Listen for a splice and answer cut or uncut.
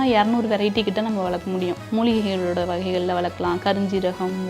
cut